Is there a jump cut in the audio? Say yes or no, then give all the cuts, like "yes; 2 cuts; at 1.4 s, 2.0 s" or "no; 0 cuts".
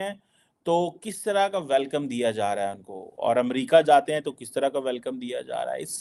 no; 0 cuts